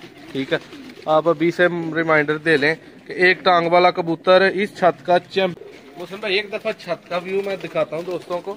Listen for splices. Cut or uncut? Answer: cut